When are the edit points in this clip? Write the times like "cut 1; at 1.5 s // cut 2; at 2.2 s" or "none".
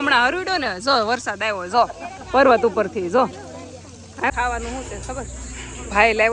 cut 1; at 4.3 s